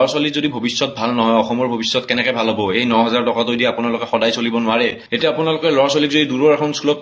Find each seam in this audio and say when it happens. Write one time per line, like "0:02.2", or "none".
0:05.0